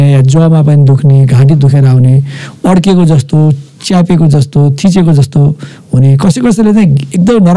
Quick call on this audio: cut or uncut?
uncut